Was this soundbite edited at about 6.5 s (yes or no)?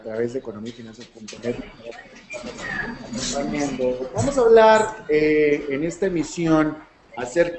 no